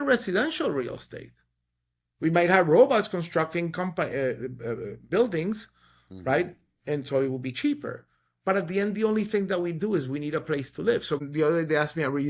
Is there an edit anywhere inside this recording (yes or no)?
yes